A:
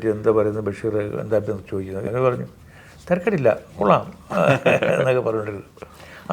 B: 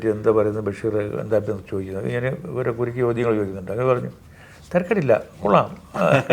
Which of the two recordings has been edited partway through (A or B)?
A